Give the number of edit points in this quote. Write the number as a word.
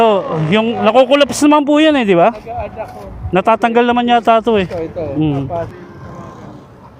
one